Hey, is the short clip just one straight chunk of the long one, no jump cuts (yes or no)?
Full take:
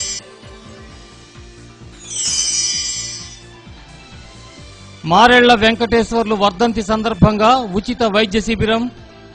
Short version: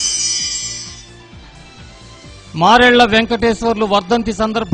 no